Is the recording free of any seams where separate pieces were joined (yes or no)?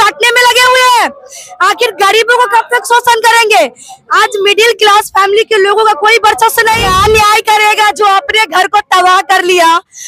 no